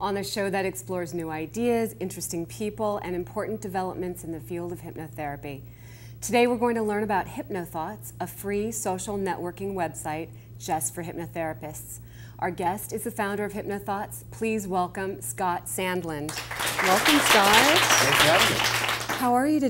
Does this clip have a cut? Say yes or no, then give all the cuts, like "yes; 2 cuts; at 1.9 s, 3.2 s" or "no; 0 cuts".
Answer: no; 0 cuts